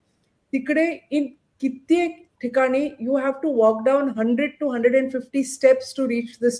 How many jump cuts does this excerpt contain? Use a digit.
0